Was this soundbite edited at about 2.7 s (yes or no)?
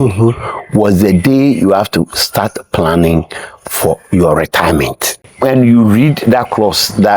no